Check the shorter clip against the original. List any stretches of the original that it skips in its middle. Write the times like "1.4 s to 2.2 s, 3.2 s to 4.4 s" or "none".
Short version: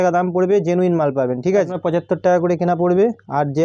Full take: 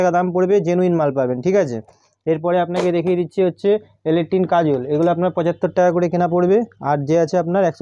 1.8 s to 5.3 s